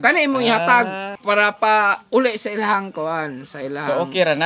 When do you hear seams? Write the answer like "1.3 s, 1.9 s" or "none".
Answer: 1.1 s

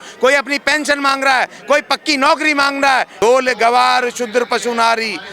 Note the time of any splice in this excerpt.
3.1 s

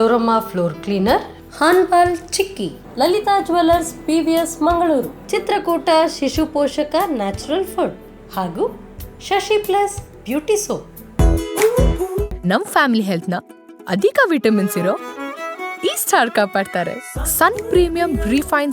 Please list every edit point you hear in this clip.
11.0 s

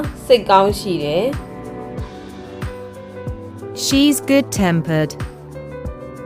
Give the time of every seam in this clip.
none

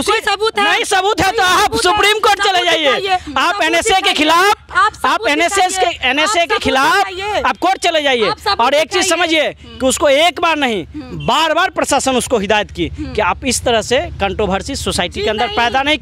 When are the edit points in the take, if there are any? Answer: none

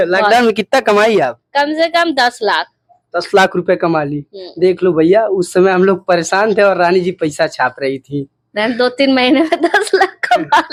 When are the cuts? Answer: none

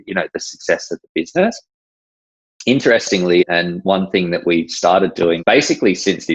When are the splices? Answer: 3.4 s, 5.4 s

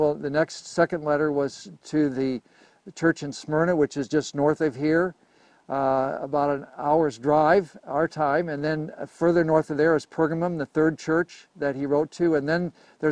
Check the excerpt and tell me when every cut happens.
none

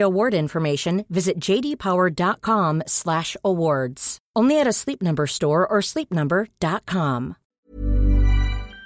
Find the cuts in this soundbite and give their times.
7.4 s

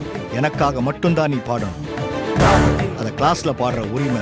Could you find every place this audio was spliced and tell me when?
none

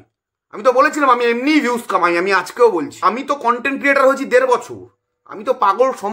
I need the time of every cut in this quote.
2.9 s

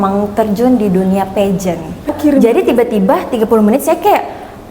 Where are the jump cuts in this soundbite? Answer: 2.1 s

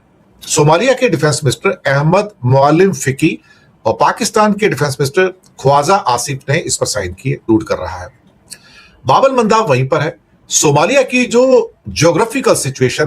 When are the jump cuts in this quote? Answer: 7.4 s

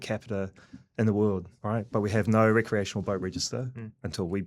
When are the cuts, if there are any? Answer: 1.5 s

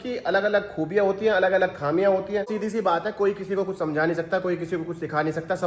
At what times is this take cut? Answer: 2.5 s

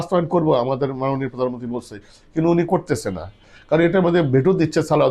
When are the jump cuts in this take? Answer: none

